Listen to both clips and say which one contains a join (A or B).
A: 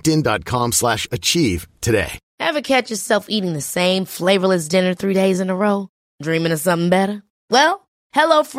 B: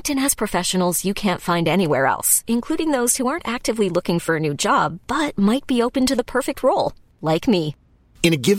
A